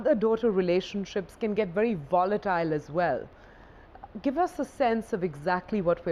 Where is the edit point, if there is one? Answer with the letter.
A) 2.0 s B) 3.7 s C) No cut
C